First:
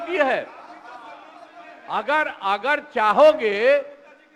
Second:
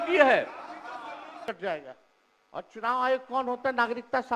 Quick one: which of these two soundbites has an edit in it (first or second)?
second